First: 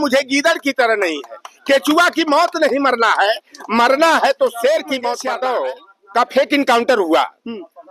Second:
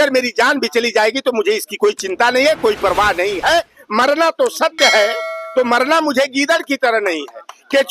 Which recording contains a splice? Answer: first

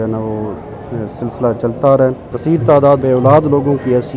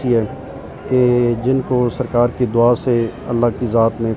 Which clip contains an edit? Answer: first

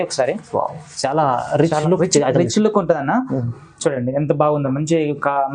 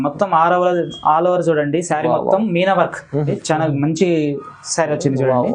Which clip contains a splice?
second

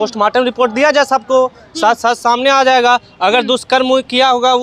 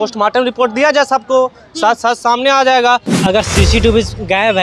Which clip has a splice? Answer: second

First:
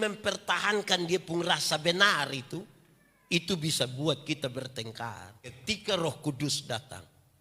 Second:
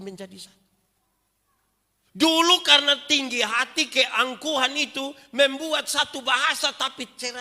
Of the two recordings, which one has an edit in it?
first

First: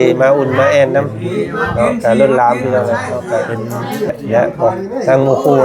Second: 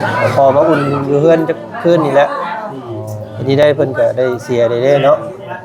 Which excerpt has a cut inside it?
first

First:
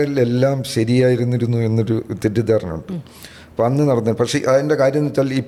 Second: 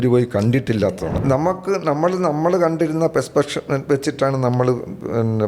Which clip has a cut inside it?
second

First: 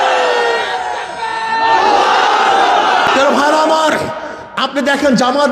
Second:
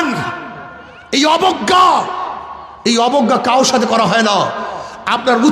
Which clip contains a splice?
first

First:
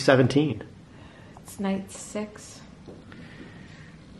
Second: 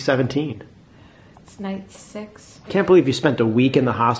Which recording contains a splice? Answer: second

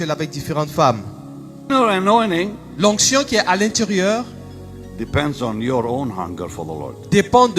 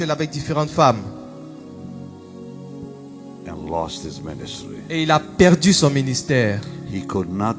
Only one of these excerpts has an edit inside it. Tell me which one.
first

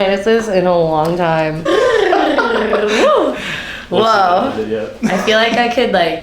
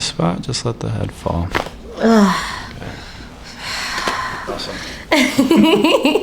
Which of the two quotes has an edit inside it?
first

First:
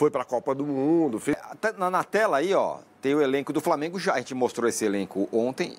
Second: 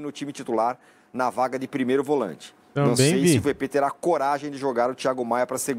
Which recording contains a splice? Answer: first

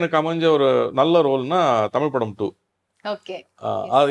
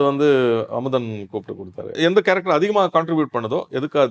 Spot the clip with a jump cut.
second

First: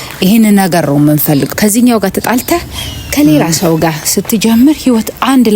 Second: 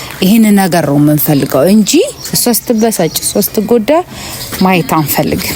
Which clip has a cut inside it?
first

